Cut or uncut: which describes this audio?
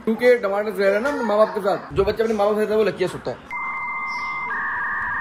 uncut